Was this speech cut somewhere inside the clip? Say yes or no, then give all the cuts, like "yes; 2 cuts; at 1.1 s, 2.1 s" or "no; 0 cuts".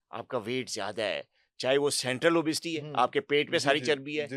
no; 0 cuts